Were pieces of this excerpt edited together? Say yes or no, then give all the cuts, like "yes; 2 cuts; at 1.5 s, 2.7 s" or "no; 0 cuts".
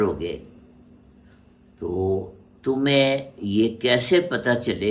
no; 0 cuts